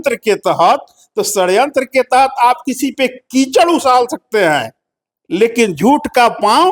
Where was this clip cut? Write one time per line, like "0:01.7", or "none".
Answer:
none